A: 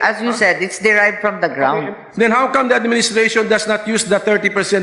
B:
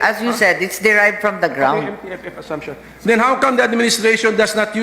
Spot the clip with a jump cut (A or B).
A